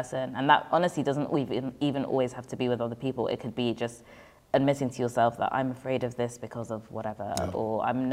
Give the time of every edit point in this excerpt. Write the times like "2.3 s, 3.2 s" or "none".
none